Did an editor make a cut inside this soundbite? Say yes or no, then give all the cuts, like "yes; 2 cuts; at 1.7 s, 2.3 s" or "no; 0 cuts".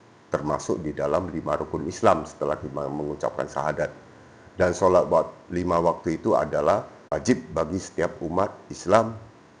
yes; 1 cut; at 7.1 s